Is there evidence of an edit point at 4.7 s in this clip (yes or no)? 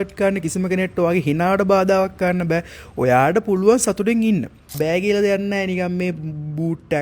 yes